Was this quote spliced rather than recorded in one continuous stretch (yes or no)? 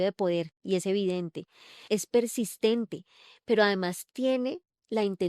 yes